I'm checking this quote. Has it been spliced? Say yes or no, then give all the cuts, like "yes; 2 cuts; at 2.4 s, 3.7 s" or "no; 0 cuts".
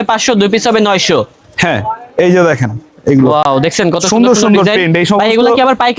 no; 0 cuts